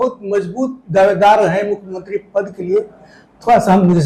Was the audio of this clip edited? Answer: no; 0 cuts

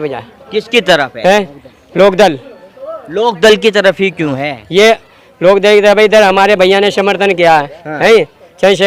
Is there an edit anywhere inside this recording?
no; 0 cuts

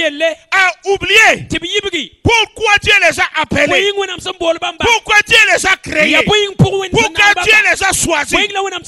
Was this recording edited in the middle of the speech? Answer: no; 0 cuts

